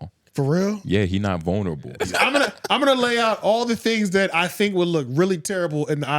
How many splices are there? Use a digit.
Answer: 1